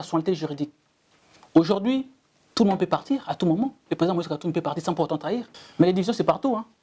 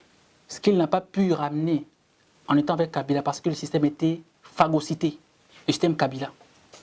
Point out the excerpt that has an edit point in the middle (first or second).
first